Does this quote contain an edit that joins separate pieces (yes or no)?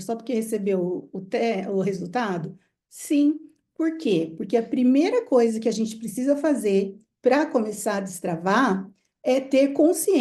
no